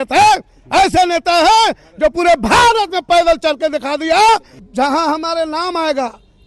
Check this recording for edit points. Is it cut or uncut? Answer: cut